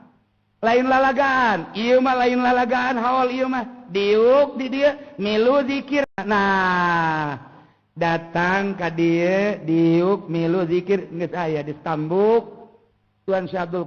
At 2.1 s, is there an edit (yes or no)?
no